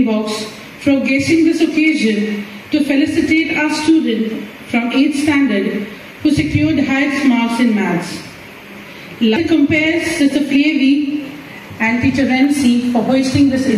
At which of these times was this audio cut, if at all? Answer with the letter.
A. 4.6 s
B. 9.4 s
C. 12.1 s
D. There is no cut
B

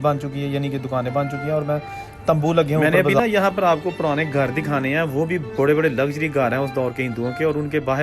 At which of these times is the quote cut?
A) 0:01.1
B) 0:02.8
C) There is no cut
B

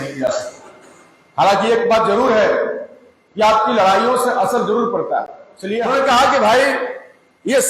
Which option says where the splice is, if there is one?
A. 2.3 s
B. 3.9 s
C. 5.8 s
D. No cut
C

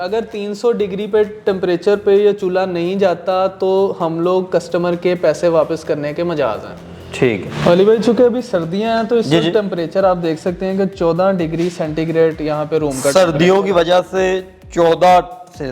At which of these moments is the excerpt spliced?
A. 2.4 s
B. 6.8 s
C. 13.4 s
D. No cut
D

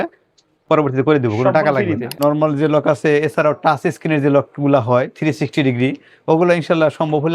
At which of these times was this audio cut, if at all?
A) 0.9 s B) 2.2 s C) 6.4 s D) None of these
B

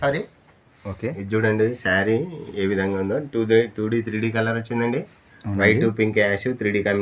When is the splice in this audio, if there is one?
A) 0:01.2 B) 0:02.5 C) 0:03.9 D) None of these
D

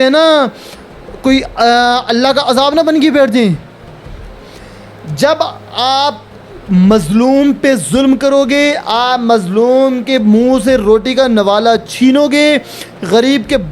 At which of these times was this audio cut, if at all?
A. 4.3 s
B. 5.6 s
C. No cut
A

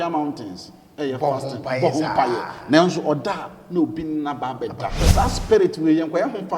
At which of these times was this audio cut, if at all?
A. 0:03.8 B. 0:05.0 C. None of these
B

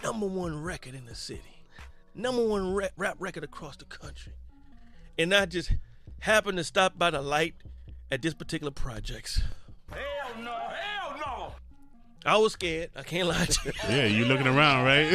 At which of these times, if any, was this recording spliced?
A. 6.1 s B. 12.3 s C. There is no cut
A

